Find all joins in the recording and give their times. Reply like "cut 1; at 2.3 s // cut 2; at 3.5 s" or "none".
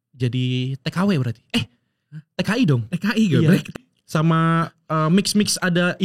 cut 1; at 3.7 s